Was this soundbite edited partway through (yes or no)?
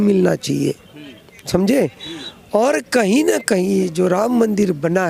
no